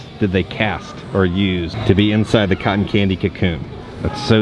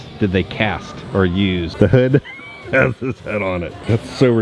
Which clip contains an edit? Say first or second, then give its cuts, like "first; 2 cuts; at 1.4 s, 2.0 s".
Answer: second; 1 cut; at 1.7 s